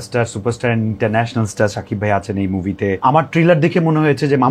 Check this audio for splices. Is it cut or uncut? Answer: cut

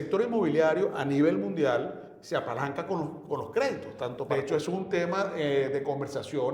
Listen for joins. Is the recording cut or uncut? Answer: cut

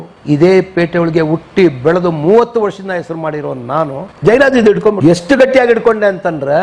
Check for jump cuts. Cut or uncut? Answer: cut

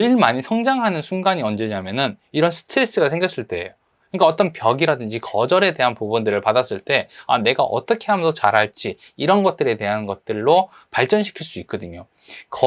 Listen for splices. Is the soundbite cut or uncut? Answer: uncut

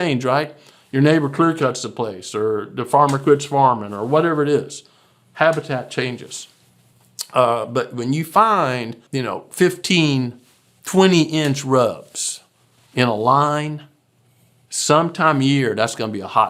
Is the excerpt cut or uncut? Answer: cut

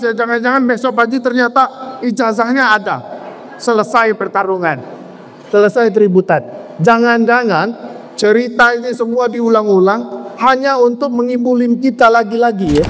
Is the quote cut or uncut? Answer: uncut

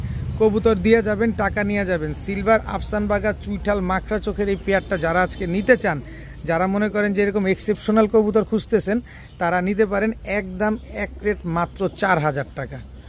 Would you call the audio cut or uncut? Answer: uncut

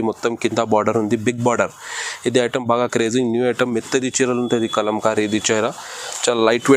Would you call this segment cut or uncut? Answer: uncut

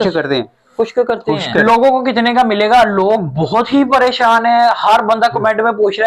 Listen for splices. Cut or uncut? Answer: cut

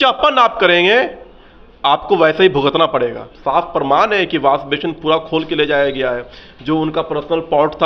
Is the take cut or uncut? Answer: cut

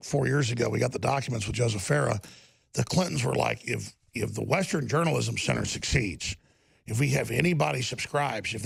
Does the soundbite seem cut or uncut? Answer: uncut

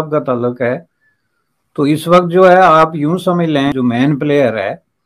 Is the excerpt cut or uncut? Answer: cut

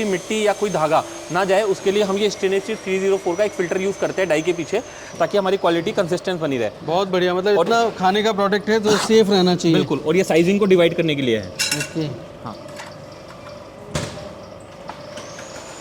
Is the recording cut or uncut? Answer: uncut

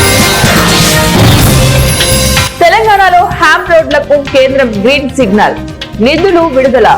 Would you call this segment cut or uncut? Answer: uncut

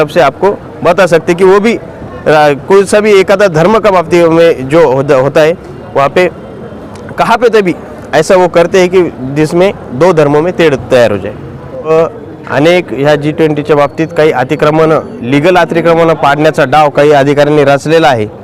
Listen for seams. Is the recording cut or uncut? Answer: cut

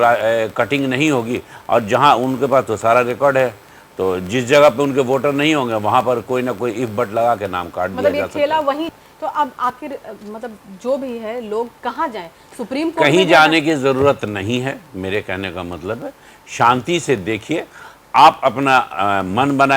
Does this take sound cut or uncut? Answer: uncut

